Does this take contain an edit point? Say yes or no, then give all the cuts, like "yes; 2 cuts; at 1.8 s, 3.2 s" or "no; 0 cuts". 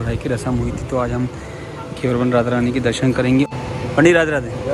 no; 0 cuts